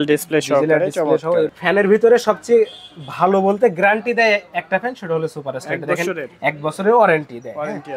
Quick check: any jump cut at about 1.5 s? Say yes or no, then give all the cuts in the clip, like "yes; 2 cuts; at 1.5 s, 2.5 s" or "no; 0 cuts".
yes; 1 cut; at 1.5 s